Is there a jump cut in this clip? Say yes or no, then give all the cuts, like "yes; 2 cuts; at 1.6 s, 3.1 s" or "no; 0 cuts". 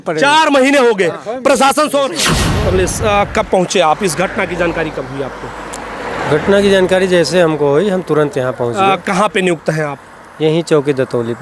yes; 1 cut; at 2.4 s